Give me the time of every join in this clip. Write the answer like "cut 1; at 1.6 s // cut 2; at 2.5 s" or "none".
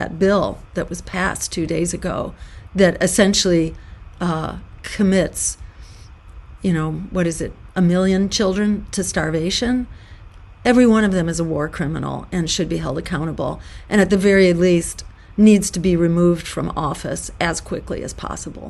none